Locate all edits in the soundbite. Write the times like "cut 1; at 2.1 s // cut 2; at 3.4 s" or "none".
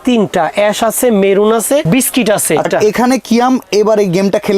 cut 1; at 1.9 s // cut 2; at 2.7 s